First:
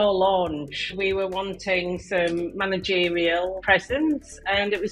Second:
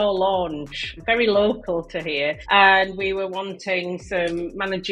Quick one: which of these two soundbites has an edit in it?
first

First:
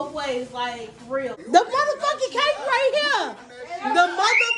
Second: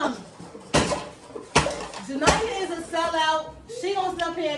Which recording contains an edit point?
first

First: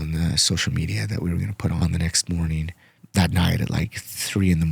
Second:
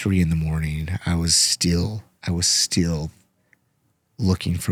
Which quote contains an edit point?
first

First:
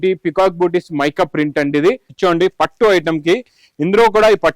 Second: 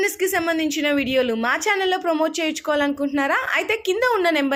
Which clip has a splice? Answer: first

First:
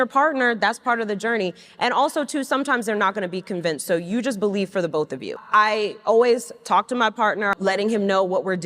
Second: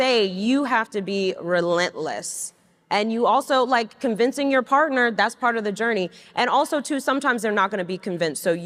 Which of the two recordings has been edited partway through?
first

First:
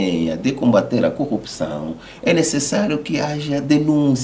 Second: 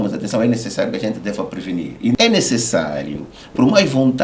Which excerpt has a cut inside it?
second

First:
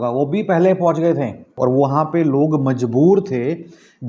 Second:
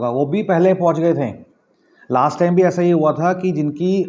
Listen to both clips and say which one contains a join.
first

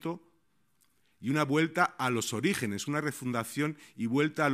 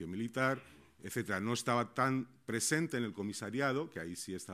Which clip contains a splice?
second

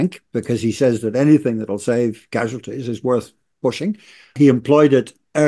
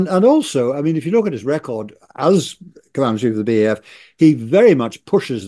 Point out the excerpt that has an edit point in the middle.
first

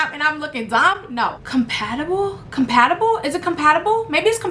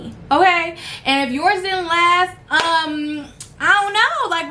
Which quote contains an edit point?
first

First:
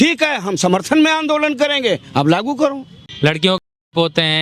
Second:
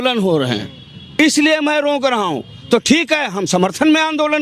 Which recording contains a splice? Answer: first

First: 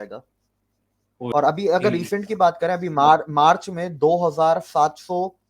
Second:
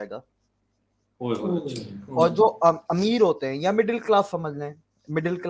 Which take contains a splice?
first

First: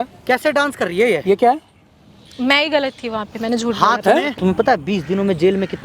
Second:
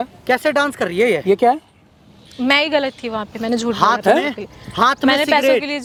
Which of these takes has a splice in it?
first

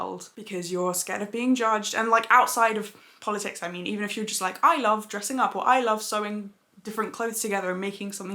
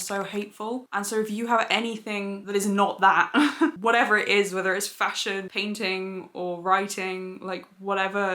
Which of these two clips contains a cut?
second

